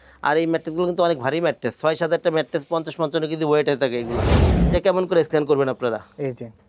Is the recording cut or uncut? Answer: cut